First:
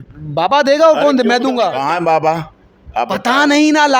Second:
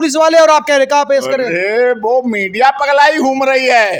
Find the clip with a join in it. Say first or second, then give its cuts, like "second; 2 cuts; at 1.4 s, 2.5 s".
first; 1 cut; at 1.7 s